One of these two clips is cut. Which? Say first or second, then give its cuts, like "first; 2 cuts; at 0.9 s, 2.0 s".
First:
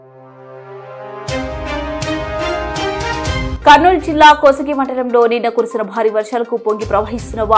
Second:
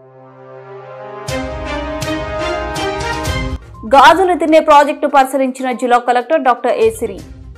first; 1 cut; at 3.5 s